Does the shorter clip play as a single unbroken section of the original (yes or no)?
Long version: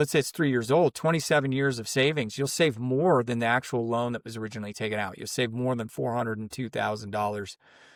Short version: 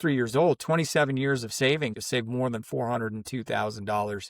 no